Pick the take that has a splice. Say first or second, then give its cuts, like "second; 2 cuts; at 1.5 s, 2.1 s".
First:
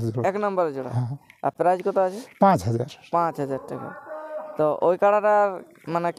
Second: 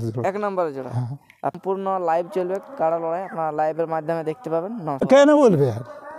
second; 2 cuts; at 1.6 s, 5.0 s